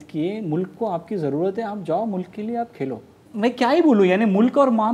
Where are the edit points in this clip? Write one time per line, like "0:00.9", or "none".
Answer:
0:03.2